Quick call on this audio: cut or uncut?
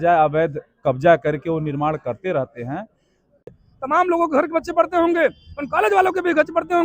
cut